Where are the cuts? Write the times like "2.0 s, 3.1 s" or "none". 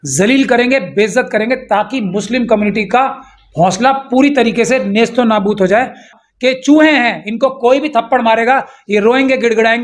6.1 s